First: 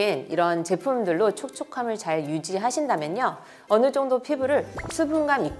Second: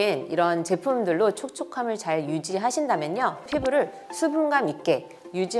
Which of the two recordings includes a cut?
second; 1 cut; at 3.5 s

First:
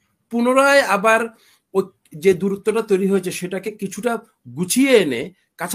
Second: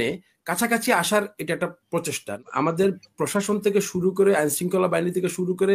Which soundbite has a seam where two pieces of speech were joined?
second; 1 cut; at 2.4 s

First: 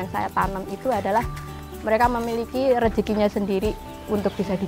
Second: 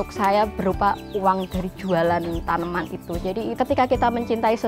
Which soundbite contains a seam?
second; 1 cut; at 3.5 s

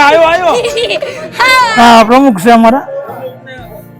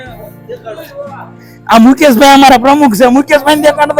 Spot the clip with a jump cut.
first; 1 cut; at 1.7 s

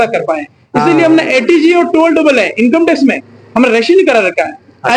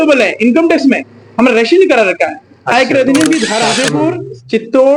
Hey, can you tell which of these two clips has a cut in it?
second; 1 cut; at 3.7 s

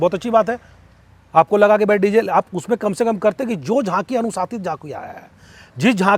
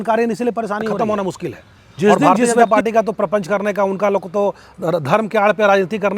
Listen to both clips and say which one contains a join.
second; 1 cut; at 2.6 s

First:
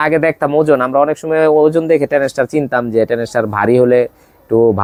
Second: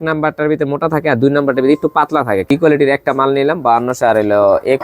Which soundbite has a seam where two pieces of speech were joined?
second; 1 cut; at 2.5 s

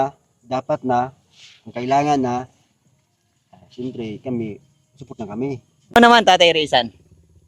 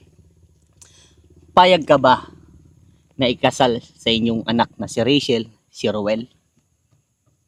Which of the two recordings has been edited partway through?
first; 1 cut; at 6.0 s

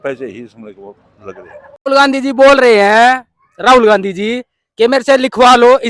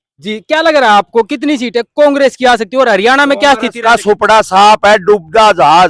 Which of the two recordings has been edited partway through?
first; 1 cut; at 1.9 s

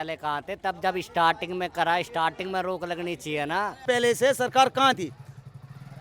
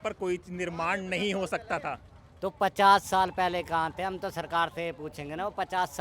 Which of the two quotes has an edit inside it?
first; 1 cut; at 3.8 s

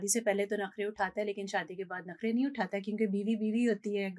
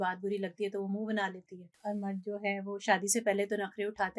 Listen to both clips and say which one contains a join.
second; 1 cut; at 1.7 s

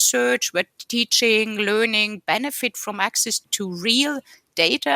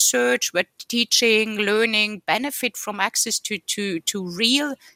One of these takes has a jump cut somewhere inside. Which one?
first; 1 cut; at 3.5 s

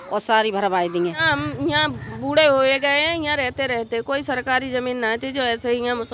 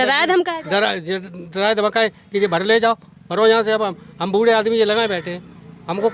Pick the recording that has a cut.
first; 1 cut; at 1.2 s

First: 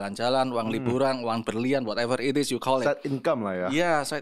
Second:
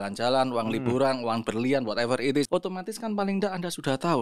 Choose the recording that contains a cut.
second; 1 cut; at 2.5 s

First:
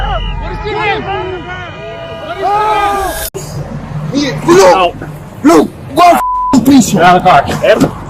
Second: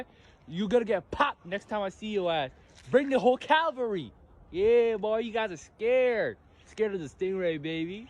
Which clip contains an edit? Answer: first; 1 cut; at 3.3 s

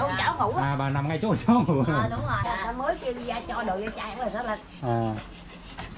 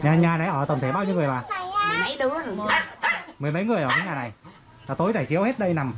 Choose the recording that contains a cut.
first; 1 cut; at 2.5 s

